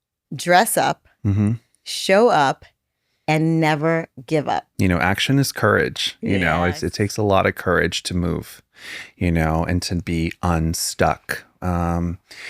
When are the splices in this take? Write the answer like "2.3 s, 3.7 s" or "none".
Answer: 4.7 s

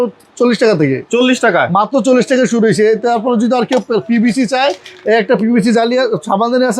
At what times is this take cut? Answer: none

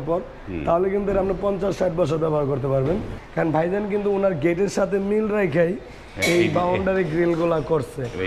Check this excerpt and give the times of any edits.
3.2 s

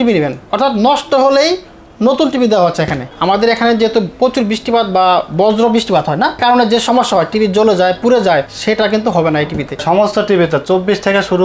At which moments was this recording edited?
3.1 s, 6.4 s, 8.5 s, 9.8 s

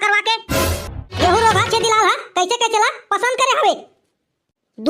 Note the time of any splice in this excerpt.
1.1 s

